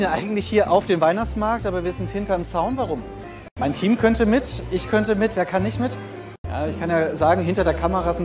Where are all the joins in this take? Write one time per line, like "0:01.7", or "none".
0:03.4
0:06.4